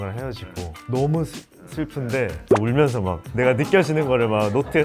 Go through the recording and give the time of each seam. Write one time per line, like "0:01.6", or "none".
0:02.4